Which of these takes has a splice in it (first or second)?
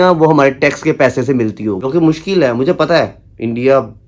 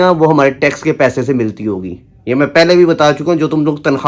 first